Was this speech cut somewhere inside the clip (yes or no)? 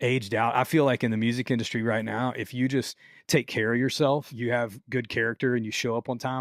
yes